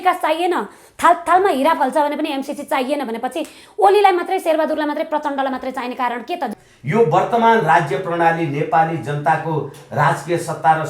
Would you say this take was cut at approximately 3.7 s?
no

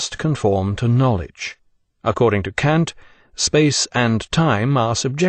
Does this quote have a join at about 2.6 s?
no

